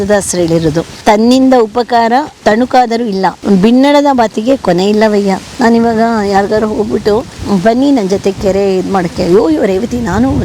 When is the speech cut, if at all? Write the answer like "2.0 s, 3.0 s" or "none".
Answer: 0.9 s, 2.3 s, 3.4 s, 5.5 s, 7.4 s

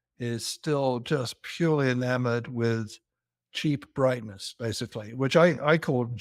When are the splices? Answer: none

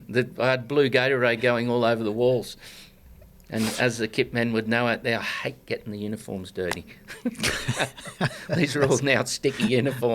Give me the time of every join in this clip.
none

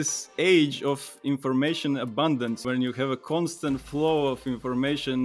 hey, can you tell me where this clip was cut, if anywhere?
2.6 s

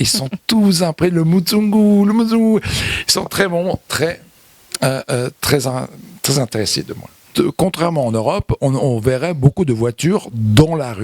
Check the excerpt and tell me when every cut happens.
7.2 s

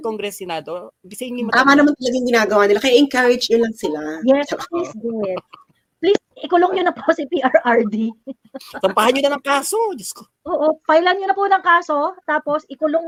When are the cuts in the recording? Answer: none

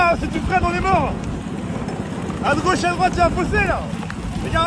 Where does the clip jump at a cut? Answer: none

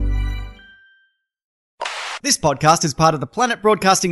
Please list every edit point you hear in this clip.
1.6 s

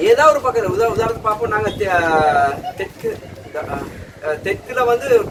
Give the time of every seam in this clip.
none

